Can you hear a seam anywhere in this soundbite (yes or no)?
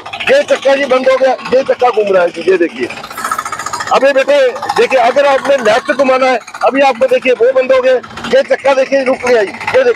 no